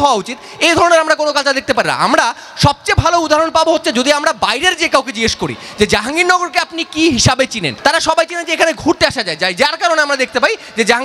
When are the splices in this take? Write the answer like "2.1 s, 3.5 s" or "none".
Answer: 7.7 s